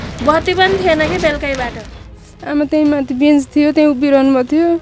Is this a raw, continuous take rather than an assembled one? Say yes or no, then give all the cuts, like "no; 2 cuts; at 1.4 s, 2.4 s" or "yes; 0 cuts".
no; 1 cut; at 2.1 s